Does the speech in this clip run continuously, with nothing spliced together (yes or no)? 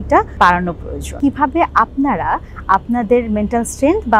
no